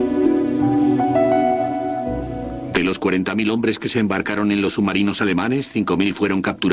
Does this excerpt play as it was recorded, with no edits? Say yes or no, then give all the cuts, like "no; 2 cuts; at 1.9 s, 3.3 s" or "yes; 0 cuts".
no; 1 cut; at 2.4 s